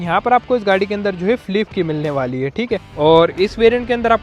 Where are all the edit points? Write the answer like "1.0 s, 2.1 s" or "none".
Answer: 2.9 s

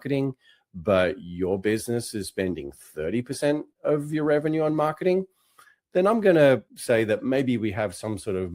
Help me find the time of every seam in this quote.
6.7 s

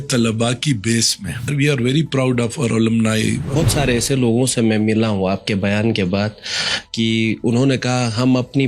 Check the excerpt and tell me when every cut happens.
1.5 s, 3.6 s

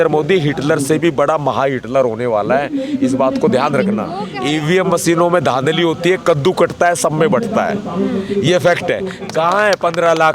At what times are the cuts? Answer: 4.3 s, 9.1 s

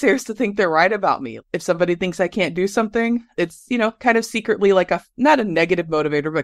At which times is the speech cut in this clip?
1.3 s, 3.4 s

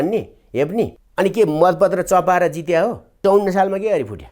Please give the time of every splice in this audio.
1.0 s, 3.2 s

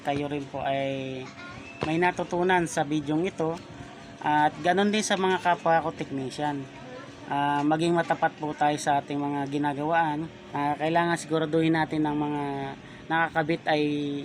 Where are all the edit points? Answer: 10.4 s

